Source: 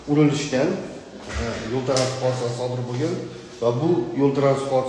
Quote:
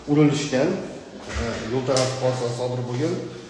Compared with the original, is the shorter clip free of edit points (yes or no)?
yes